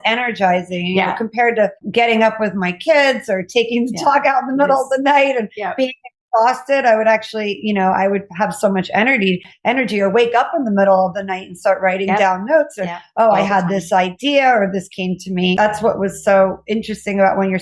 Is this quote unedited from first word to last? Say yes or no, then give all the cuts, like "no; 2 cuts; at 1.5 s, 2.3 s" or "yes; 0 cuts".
no; 2 cuts; at 1.8 s, 15.6 s